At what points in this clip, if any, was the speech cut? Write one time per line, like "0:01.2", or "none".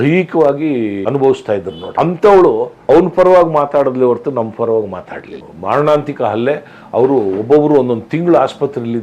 0:01.0
0:01.8
0:02.8
0:05.5